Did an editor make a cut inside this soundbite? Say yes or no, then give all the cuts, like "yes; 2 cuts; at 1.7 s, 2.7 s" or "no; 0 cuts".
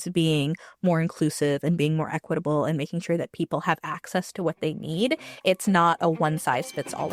no; 0 cuts